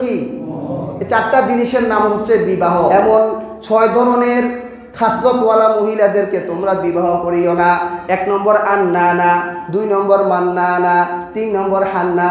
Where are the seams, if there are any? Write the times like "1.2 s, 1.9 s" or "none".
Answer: 2.9 s